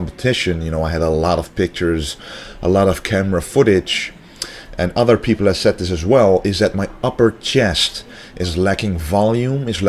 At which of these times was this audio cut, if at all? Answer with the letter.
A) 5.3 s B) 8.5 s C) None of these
A